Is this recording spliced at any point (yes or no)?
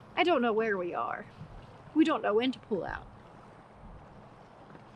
no